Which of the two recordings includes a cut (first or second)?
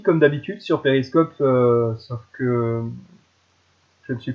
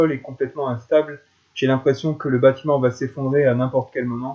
second